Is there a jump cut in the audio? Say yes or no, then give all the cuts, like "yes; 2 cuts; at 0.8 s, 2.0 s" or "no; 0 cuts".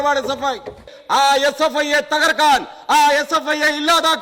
yes; 1 cut; at 0.9 s